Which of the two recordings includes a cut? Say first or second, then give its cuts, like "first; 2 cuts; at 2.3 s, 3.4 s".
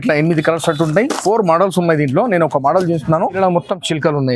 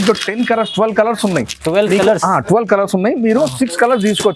first; 1 cut; at 3.4 s